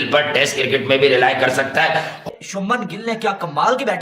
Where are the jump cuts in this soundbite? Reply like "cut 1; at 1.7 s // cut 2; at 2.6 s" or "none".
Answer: cut 1; at 2.3 s